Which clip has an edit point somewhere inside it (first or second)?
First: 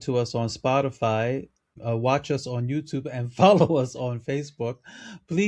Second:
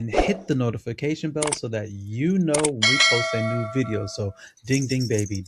first